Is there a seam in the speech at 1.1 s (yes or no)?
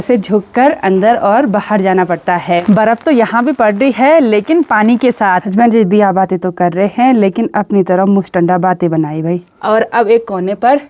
no